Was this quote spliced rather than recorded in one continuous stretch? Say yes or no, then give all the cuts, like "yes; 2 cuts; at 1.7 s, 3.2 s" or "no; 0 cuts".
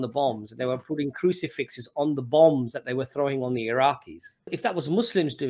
yes; 1 cut; at 4.5 s